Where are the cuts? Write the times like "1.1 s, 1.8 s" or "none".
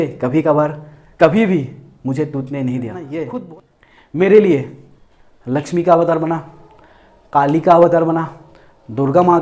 3.2 s